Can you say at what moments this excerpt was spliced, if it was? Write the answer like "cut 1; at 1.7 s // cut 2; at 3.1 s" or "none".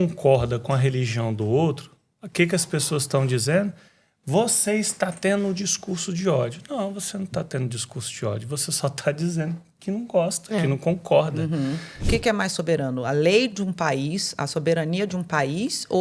cut 1; at 12.0 s